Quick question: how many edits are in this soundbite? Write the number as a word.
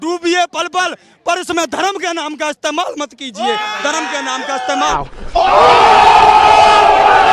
one